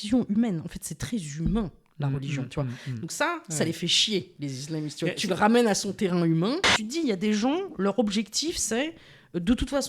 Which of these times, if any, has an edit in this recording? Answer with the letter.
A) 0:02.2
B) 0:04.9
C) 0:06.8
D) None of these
C